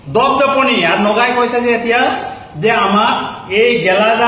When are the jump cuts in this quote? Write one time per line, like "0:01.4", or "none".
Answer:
none